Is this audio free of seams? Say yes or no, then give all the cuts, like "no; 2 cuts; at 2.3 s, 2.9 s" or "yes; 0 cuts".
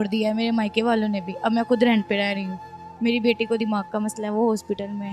yes; 0 cuts